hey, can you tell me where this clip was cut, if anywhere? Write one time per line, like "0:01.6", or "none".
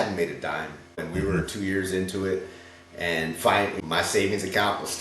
0:03.8

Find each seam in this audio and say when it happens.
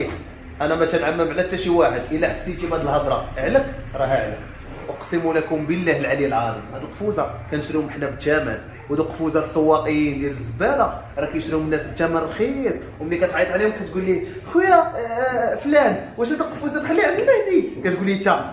0:04.7

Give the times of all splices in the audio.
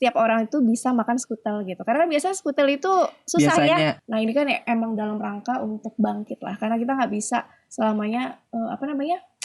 0:03.9

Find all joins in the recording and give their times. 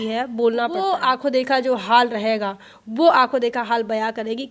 0:00.9

